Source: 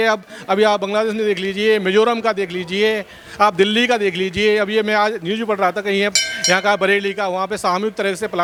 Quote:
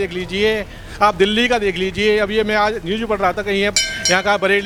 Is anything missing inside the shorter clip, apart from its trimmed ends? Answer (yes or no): no